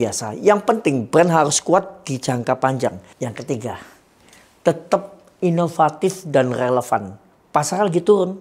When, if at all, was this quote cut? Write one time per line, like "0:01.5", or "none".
0:03.1